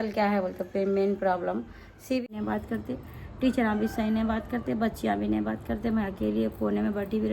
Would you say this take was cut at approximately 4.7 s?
no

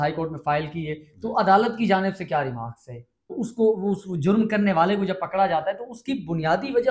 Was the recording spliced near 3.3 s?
yes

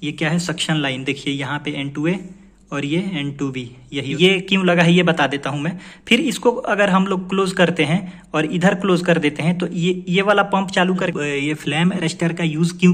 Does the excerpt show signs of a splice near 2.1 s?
no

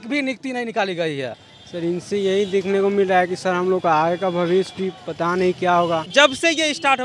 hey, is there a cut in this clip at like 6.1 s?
yes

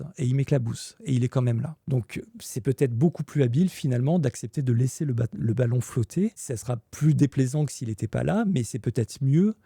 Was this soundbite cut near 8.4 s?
no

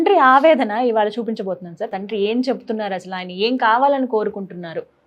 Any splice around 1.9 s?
yes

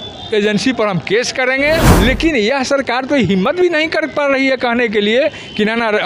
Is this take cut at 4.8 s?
no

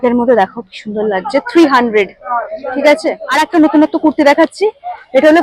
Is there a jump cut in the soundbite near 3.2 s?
yes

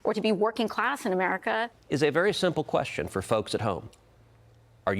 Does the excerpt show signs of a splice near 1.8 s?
yes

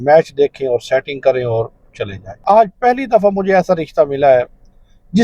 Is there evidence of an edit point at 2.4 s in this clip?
yes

